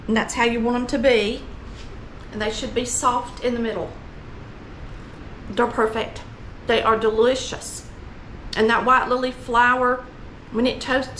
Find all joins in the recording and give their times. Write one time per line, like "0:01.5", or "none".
0:05.2